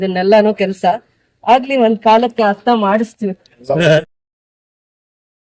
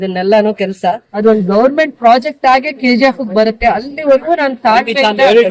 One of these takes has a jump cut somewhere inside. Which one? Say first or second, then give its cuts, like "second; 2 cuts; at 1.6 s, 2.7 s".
second; 1 cut; at 1.1 s